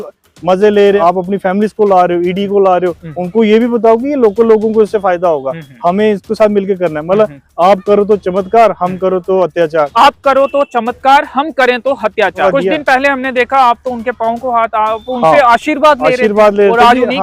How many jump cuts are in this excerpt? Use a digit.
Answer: 3